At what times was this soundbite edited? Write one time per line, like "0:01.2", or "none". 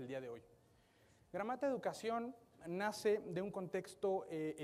0:01.4

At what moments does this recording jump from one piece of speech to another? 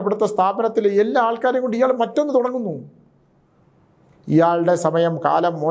none

